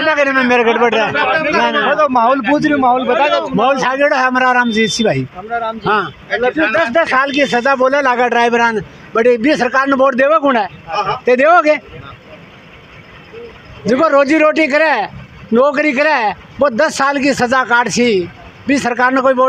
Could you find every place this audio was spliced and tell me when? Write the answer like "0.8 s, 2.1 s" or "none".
none